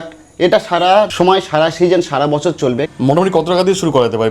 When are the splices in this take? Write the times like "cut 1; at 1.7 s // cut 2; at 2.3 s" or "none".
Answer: cut 1; at 1.1 s // cut 2; at 2.9 s

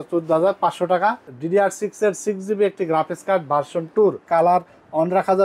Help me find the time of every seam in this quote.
cut 1; at 1.3 s // cut 2; at 4.2 s

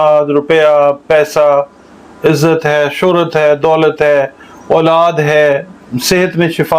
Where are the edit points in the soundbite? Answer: none

